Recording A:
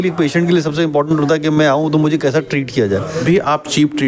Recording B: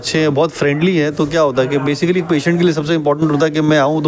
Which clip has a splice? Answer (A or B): A